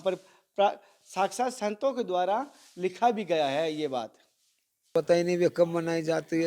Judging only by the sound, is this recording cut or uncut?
cut